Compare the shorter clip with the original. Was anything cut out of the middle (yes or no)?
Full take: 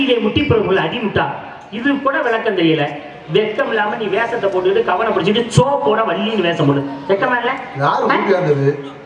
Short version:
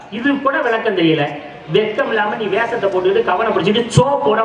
no